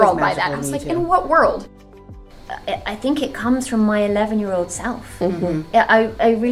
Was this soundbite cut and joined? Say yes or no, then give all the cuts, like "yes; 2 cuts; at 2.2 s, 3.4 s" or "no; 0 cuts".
yes; 1 cut; at 2.0 s